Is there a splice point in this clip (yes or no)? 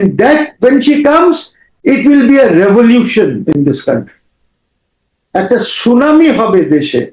no